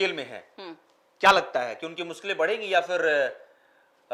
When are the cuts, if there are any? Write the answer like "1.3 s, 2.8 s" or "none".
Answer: none